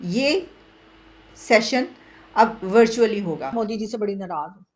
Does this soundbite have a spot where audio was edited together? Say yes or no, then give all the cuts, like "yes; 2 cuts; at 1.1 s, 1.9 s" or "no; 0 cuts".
yes; 1 cut; at 3.5 s